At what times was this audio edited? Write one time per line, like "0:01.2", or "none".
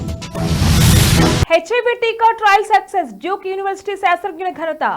0:01.1